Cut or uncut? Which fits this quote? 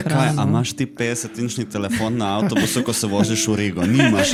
uncut